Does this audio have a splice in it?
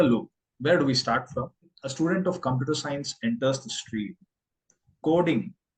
yes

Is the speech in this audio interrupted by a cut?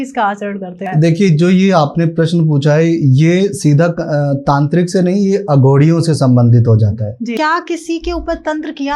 yes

